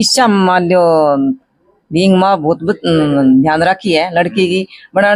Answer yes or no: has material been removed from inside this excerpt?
no